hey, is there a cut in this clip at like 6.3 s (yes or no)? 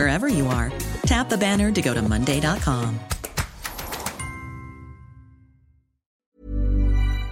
yes